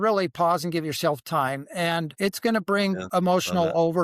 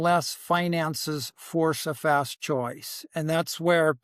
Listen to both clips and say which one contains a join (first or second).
first